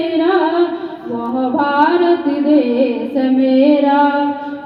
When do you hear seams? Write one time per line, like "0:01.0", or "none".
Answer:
none

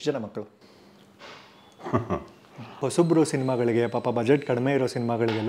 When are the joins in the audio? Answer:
0:02.8

